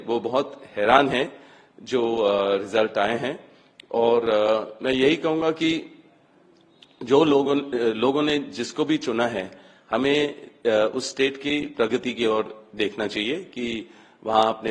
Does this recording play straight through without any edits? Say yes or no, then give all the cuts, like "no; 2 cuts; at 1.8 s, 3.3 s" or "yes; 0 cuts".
yes; 0 cuts